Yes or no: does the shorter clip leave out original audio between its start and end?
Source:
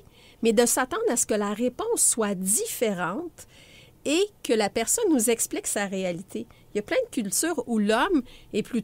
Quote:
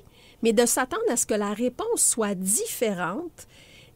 no